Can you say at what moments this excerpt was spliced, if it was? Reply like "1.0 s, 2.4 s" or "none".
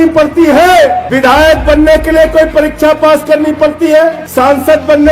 1.0 s, 4.2 s